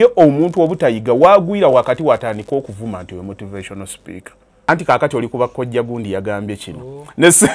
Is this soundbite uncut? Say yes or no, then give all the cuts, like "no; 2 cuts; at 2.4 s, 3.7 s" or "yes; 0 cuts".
no; 1 cut; at 4.7 s